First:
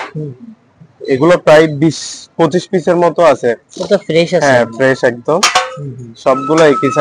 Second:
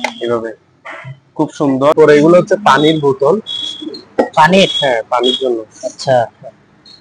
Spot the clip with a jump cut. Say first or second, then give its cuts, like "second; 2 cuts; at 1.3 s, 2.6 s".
second; 1 cut; at 2.0 s